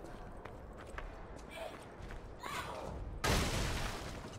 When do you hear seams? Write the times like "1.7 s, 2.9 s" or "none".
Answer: 0.9 s